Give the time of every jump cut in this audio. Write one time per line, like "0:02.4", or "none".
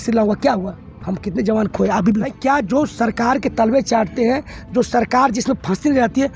0:02.3